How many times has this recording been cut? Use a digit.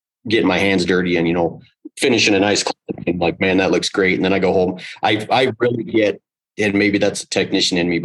0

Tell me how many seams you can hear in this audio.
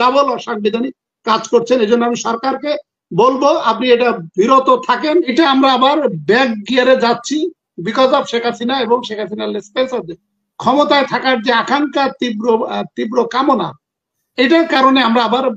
1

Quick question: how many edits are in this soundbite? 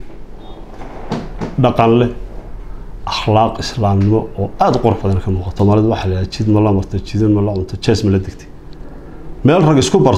1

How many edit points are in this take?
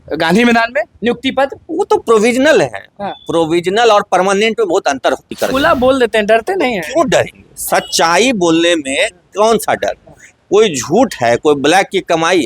1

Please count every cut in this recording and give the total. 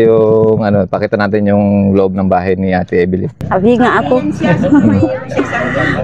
1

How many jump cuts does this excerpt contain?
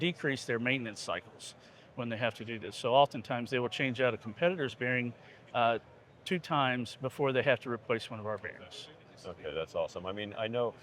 0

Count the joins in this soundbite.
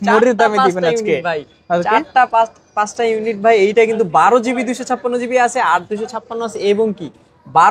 0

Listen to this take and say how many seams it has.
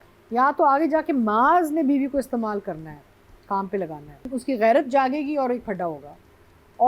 1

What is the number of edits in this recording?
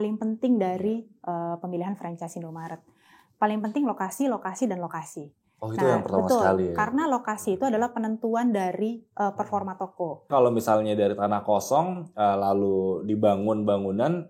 1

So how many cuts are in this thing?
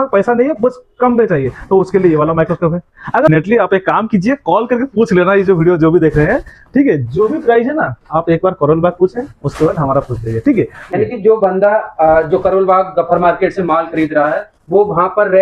2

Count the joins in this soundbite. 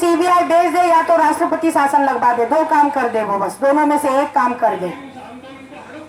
0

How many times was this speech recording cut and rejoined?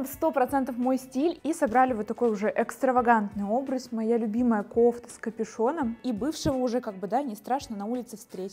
2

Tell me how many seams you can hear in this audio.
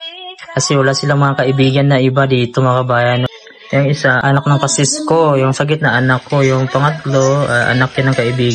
2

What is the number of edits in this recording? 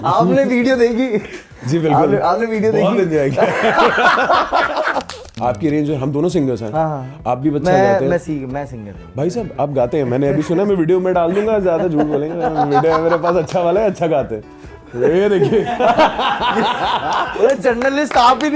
1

